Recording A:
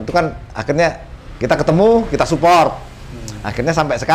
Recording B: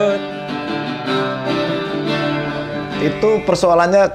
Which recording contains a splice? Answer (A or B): B